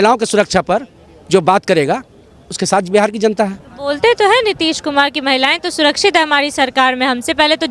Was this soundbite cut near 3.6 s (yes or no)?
no